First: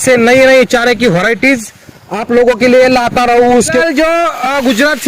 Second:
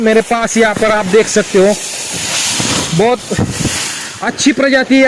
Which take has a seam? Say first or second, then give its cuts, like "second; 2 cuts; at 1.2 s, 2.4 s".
first; 1 cut; at 3.8 s